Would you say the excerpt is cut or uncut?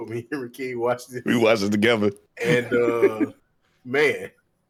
uncut